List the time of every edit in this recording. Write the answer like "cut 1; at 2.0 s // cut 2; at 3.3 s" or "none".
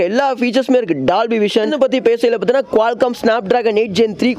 cut 1; at 1.7 s

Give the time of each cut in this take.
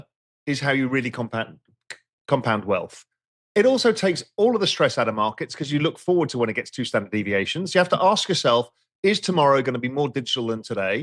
none

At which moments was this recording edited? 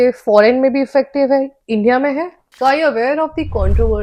cut 1; at 2.4 s

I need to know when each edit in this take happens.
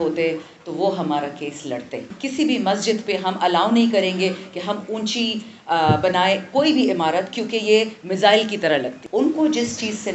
cut 1; at 2.0 s // cut 2; at 9.0 s

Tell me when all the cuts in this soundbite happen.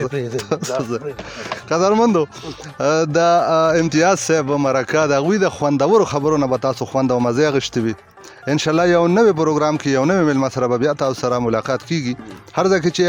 none

